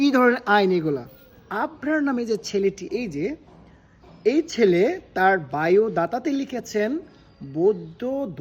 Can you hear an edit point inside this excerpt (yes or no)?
yes